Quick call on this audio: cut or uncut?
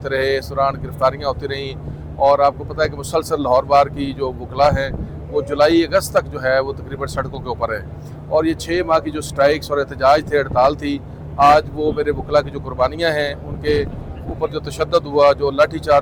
uncut